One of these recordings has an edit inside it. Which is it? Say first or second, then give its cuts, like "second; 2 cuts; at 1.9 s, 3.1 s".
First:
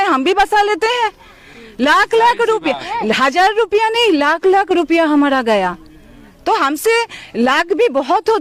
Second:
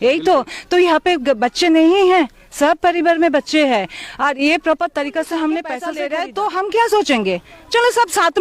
second; 1 cut; at 6.0 s